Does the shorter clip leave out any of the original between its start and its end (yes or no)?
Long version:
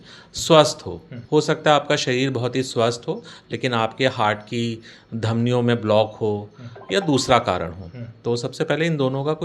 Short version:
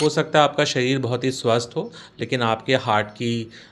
no